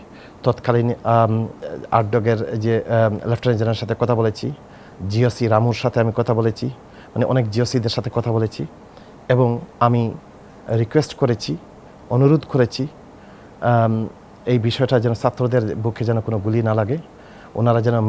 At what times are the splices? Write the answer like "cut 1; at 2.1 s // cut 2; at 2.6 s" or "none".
none